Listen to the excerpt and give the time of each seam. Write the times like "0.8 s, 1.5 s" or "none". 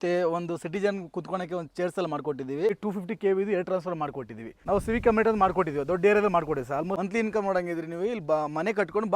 2.8 s, 4.6 s, 7.0 s